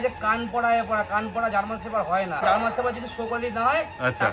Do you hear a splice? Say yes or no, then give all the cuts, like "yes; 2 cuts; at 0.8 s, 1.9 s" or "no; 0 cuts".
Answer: yes; 1 cut; at 2.4 s